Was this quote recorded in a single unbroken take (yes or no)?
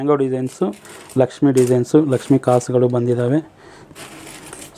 yes